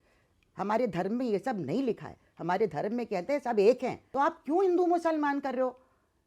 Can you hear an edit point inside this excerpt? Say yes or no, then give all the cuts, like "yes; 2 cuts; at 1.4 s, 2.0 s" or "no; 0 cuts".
yes; 1 cut; at 4.0 s